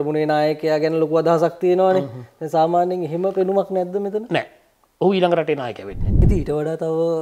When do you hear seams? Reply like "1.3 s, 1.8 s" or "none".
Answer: 6.2 s